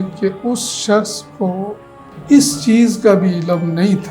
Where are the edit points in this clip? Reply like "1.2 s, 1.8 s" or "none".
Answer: none